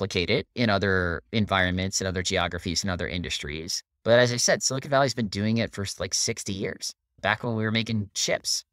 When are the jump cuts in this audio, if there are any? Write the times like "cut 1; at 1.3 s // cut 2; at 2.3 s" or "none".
none